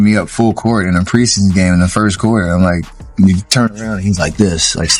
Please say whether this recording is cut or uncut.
uncut